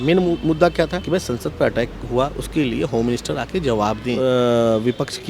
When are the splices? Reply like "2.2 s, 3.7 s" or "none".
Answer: 1.0 s, 4.2 s